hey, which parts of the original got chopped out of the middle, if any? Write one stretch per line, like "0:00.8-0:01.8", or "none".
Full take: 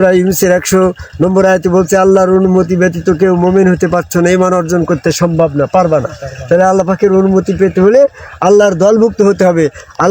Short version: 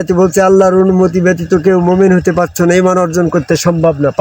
none